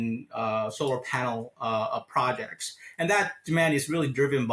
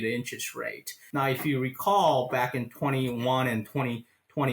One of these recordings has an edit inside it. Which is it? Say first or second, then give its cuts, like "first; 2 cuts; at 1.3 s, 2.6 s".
second; 1 cut; at 0.9 s